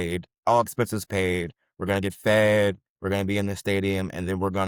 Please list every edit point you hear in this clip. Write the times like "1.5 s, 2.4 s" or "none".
none

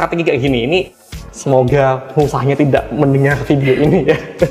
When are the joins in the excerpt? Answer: 1.0 s

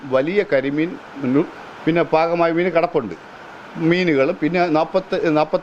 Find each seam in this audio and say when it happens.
none

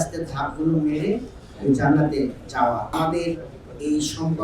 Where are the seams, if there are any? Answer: 2.9 s

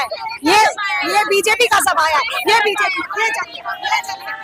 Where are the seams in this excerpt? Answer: none

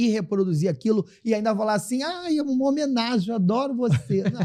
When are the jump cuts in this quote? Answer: none

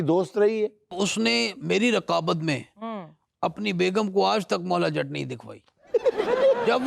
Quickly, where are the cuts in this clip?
0.9 s

